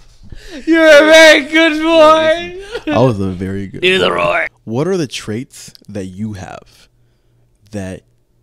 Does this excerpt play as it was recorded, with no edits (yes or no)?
no